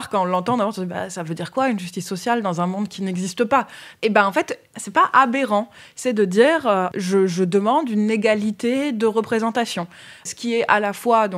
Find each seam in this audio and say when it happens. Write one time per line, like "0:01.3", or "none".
0:03.8
0:04.7
0:06.9
0:10.2

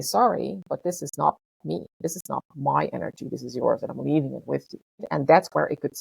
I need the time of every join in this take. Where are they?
0:05.1

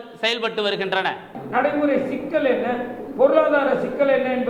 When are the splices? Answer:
0:01.4

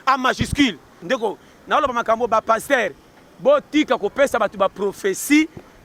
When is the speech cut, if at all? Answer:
0:01.0

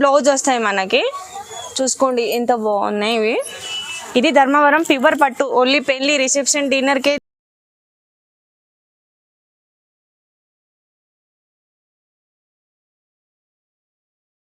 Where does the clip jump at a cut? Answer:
none

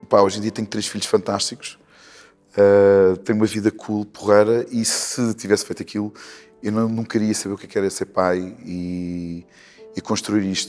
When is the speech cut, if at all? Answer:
none

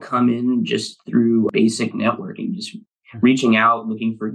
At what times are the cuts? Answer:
none

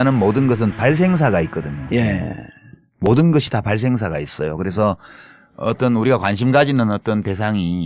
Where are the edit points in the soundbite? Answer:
none

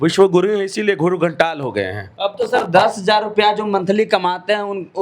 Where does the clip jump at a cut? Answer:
0:02.1

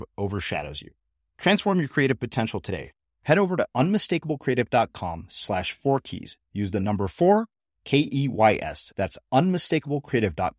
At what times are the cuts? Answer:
none

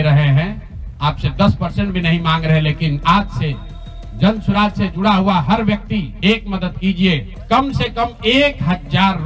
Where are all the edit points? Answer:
0:06.1
0:07.3

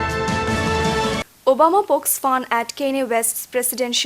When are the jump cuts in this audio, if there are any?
0:01.1

